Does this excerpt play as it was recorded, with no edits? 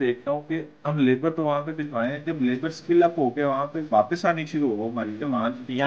yes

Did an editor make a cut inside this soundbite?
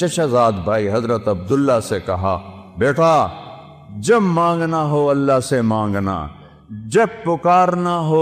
no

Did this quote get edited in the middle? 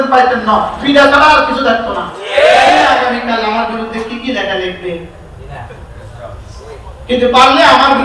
yes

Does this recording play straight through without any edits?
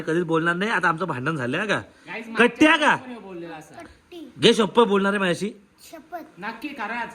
yes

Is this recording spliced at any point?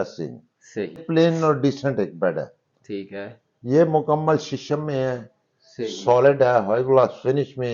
yes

